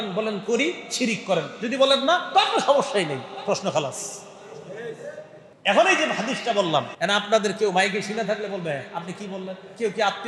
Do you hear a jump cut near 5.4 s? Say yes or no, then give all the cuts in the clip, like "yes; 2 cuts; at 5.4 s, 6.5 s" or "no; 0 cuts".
yes; 2 cuts; at 5.4 s, 6.9 s